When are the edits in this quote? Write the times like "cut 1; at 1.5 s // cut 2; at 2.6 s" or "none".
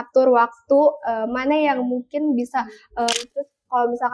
cut 1; at 3.1 s

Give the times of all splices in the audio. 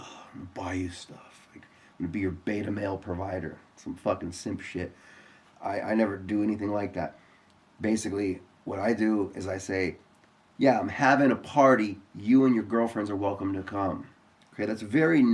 none

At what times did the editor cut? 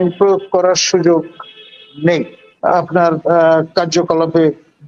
cut 1; at 2.5 s

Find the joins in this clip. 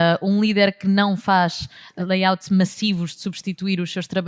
cut 1; at 1.9 s

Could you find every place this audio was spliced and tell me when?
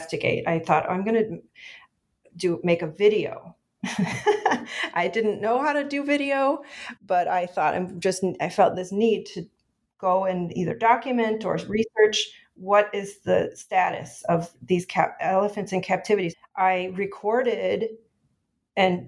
cut 1; at 16.3 s

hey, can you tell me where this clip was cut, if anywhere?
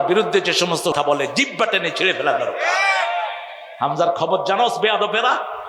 cut 1; at 0.9 s

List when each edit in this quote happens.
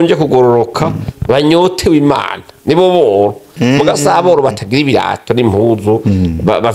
none

